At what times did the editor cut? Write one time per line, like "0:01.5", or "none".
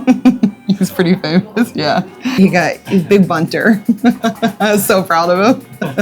0:02.3